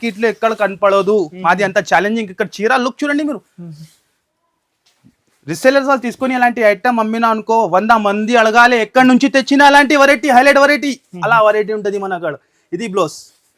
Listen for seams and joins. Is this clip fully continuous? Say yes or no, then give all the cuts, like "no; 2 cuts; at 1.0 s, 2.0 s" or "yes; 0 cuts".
yes; 0 cuts